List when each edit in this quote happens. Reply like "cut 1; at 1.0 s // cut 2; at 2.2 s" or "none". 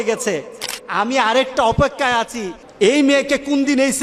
none